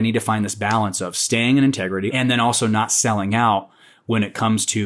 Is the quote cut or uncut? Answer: cut